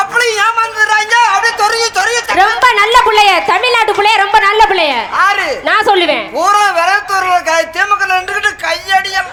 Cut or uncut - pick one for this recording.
uncut